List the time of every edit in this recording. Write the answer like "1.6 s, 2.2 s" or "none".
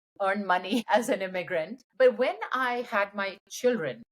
0.9 s, 1.8 s